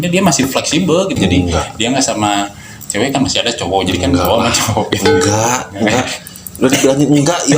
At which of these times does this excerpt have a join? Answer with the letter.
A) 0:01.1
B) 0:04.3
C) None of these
A